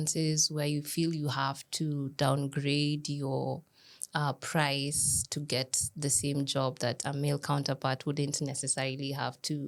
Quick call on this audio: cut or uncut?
uncut